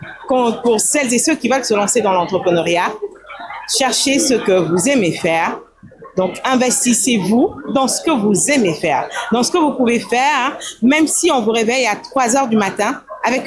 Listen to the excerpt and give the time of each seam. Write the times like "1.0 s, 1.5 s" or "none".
none

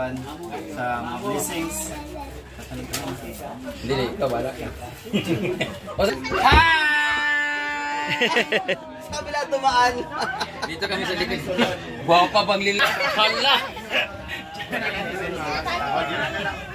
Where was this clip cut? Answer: 6.1 s

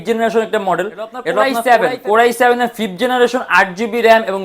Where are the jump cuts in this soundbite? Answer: 1.5 s

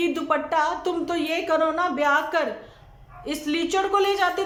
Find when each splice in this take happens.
none

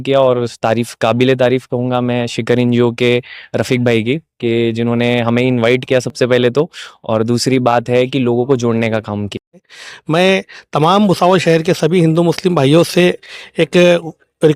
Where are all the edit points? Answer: 9.8 s

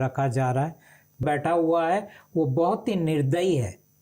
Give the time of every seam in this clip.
1.2 s

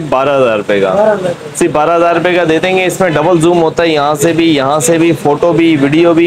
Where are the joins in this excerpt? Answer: none

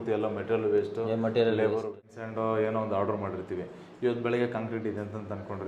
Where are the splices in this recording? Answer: 2.1 s

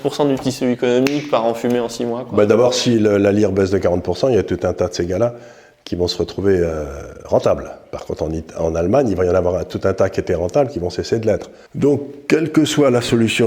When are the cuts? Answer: 11.6 s

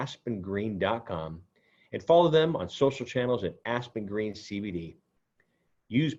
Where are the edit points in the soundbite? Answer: none

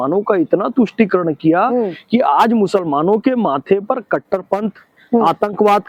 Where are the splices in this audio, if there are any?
none

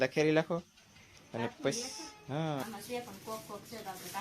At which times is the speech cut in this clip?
2.7 s

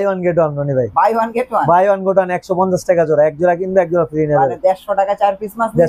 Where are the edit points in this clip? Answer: none

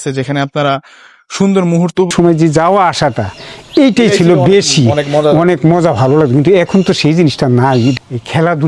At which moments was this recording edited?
2.1 s, 7.9 s

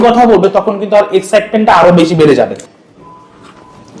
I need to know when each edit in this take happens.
2.6 s

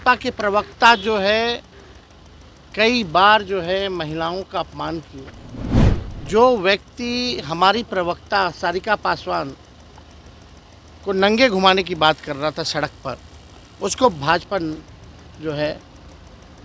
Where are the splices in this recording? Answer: 5.6 s

